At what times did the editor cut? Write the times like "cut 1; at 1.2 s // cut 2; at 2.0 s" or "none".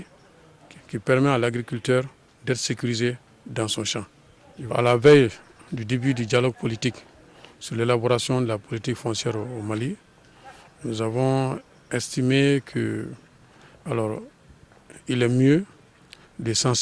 cut 1; at 4.7 s